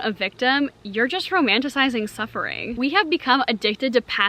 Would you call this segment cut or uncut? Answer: cut